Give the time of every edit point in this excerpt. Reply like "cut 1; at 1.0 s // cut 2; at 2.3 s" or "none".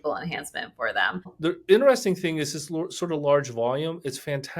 cut 1; at 1.2 s